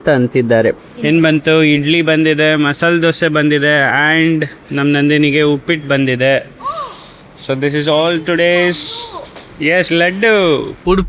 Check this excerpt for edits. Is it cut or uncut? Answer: uncut